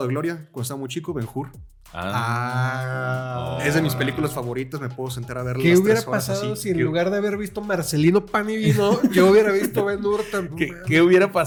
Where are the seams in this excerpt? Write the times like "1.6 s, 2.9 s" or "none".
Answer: none